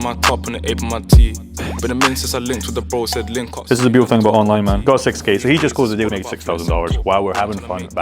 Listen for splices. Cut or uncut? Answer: cut